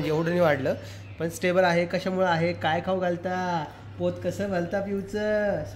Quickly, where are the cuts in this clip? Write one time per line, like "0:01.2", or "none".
none